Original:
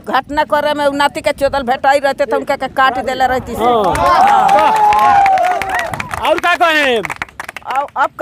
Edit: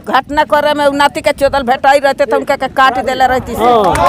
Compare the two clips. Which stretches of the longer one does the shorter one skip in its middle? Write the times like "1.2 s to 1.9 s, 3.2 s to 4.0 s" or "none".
none